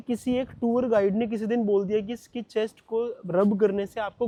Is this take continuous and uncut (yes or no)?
yes